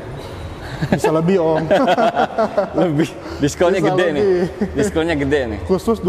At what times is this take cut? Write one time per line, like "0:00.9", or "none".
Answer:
none